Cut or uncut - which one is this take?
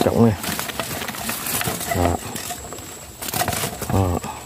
uncut